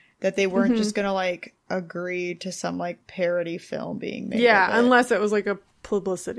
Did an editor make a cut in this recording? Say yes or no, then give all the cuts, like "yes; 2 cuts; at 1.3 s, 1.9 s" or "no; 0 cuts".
yes; 2 cuts; at 1.5 s, 3.0 s